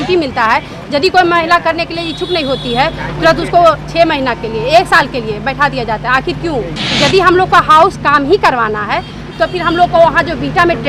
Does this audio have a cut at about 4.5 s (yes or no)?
no